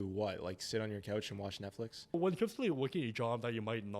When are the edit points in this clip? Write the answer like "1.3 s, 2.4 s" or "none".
2.1 s